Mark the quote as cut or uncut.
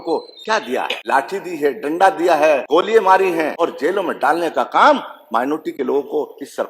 cut